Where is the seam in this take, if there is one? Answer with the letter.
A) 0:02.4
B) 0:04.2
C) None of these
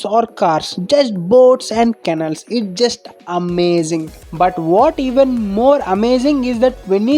B